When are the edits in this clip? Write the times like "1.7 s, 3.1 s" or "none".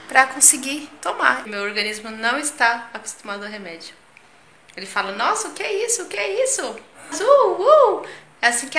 1.4 s, 7.1 s